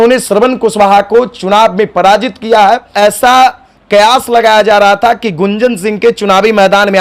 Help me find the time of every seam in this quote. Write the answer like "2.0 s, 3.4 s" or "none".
2.9 s